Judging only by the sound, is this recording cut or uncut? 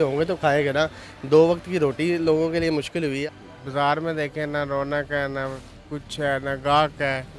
cut